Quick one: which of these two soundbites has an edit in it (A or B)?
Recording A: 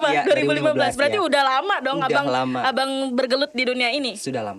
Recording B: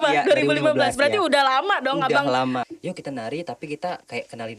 B